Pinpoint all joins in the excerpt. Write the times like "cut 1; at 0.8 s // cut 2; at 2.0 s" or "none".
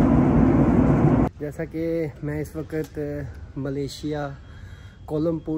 cut 1; at 1.3 s